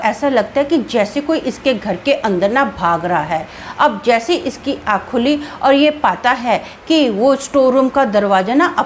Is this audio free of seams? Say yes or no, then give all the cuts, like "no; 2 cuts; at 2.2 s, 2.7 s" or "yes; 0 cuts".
yes; 0 cuts